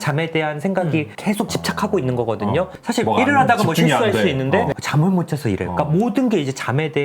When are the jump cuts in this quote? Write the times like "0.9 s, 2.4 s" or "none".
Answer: 2.8 s